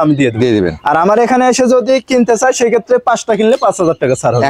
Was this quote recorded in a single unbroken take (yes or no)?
yes